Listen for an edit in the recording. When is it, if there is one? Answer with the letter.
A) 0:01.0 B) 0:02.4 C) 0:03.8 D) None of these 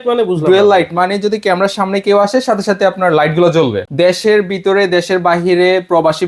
C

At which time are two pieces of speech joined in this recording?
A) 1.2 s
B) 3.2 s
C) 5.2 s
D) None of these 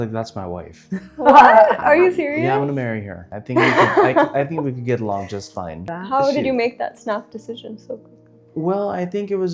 D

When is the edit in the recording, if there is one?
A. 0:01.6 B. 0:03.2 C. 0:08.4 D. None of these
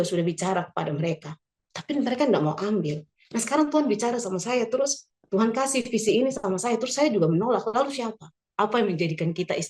C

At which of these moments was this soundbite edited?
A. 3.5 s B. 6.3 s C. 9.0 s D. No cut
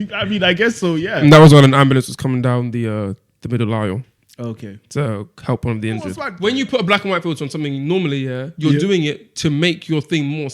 B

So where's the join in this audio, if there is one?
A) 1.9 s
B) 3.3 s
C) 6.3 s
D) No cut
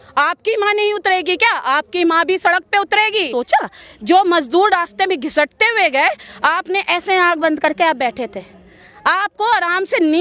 B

